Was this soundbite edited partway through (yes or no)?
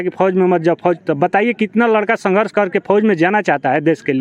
no